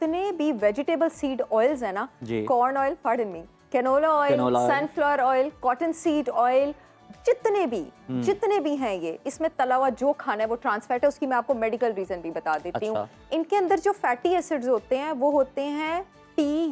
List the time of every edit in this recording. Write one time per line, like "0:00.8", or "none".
none